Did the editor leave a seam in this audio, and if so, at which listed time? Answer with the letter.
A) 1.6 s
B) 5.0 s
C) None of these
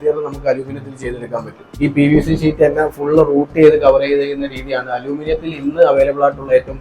A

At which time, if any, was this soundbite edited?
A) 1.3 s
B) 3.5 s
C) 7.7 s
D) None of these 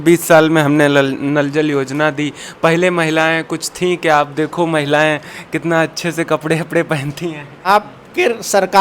C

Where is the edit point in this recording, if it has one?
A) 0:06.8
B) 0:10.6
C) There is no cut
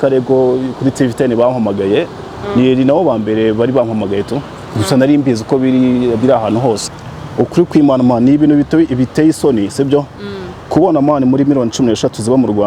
A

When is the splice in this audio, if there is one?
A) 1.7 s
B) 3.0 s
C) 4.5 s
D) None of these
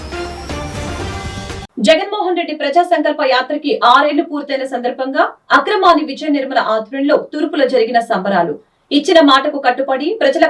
A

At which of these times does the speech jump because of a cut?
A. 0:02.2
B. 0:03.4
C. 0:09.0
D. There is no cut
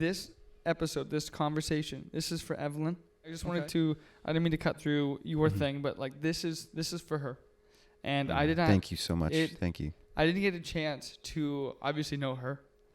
B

